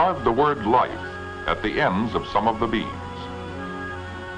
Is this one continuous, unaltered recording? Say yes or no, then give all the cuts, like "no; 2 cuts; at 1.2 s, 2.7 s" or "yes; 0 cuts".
no; 1 cut; at 2.2 s